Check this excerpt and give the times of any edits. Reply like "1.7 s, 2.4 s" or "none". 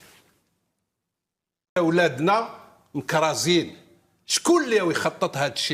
1.8 s